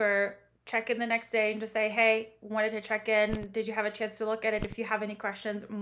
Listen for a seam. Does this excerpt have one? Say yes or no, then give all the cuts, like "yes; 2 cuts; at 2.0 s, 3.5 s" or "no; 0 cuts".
no; 0 cuts